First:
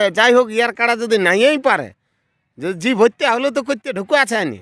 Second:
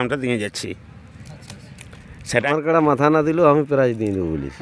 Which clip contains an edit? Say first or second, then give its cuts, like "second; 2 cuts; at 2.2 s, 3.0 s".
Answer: second; 1 cut; at 2.5 s